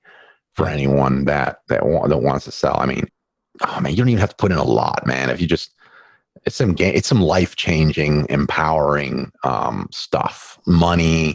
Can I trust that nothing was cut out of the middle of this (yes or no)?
no